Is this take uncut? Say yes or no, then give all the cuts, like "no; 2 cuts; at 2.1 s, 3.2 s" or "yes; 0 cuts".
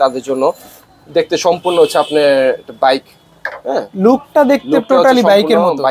yes; 0 cuts